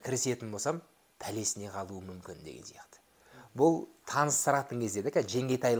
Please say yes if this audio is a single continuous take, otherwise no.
yes